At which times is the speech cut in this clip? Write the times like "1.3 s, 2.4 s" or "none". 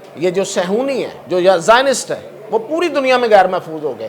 1.2 s